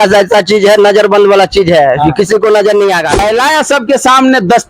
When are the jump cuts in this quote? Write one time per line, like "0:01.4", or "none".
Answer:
0:03.1